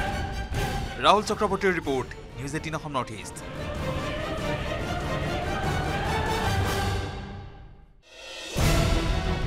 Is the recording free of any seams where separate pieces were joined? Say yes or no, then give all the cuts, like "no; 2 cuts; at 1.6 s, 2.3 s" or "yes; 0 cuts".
no; 1 cut; at 8.4 s